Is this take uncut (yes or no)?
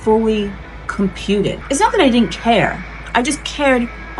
no